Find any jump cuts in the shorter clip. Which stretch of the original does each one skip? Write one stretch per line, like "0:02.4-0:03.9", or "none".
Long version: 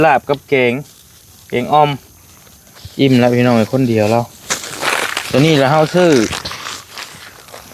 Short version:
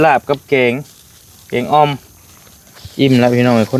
none